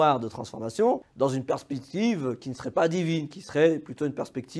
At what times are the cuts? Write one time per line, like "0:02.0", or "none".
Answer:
0:01.1